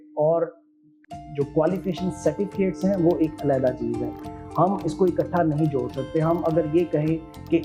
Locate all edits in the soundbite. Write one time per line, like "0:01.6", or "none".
none